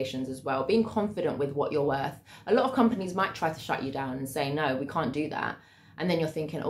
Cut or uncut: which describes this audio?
uncut